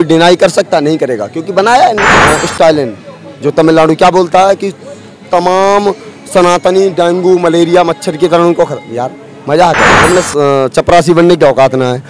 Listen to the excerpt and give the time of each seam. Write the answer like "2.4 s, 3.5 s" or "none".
2.1 s, 9.9 s